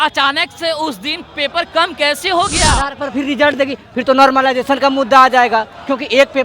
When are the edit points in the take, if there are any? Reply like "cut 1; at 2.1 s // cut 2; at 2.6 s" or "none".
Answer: cut 1; at 2.9 s